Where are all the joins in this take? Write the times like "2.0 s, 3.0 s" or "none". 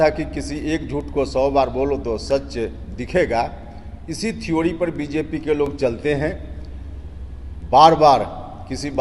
none